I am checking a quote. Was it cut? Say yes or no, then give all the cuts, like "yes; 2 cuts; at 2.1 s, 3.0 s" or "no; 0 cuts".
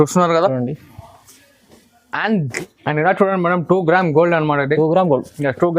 yes; 1 cut; at 2.5 s